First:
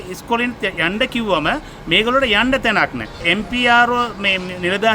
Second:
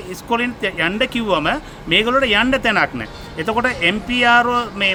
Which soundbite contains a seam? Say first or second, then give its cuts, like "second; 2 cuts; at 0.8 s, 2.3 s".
first; 1 cut; at 3.2 s